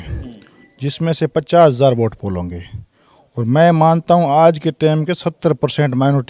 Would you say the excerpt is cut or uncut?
uncut